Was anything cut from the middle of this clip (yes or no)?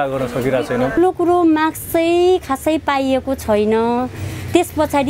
yes